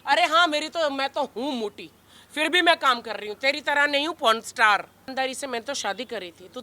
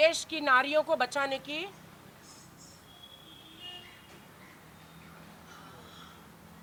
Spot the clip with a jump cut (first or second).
first